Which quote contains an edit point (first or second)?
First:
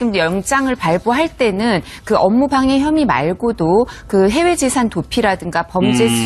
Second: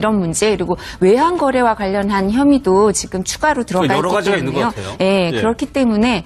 first